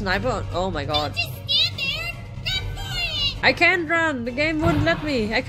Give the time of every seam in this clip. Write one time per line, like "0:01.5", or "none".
0:03.4